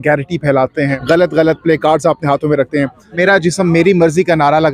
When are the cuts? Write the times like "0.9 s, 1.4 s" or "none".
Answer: 1.0 s, 3.1 s